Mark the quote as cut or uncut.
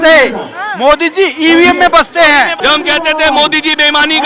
cut